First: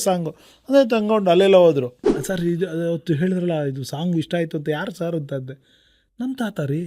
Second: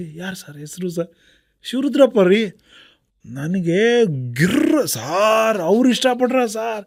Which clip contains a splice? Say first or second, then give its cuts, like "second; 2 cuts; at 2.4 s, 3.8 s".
first; 1 cut; at 2.0 s